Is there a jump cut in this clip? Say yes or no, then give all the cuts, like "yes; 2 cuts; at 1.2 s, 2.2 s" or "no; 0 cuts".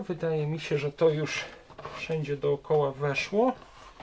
no; 0 cuts